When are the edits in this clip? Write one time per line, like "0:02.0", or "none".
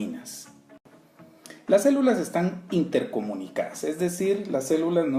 0:02.5